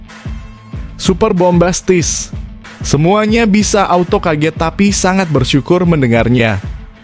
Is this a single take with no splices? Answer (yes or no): no